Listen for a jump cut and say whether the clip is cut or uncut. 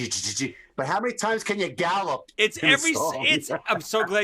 uncut